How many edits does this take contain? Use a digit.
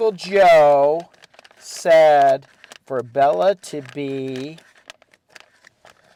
0